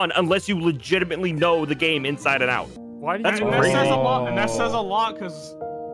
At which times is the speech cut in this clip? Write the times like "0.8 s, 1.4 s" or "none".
2.8 s